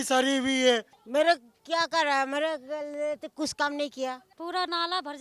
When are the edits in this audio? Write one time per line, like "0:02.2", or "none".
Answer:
0:01.0
0:04.3